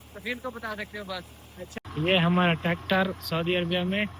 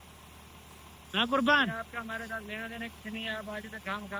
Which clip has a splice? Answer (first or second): first